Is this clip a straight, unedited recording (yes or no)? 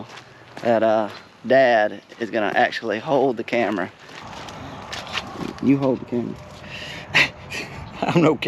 no